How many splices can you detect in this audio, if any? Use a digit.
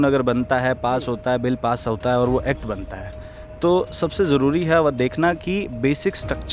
0